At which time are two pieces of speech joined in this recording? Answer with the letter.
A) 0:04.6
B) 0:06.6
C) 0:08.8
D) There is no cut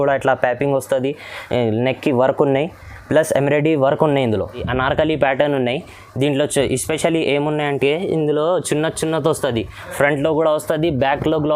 A